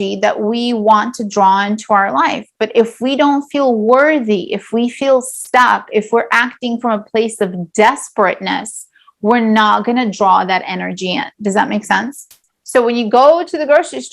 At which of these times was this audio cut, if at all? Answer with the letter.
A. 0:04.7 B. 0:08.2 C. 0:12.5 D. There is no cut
C